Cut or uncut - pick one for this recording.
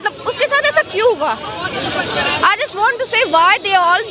uncut